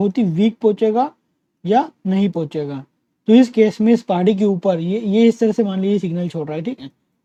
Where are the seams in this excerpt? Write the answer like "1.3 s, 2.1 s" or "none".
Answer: none